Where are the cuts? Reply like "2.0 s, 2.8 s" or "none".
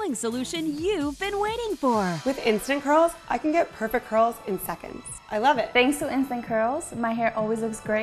2.2 s, 5.7 s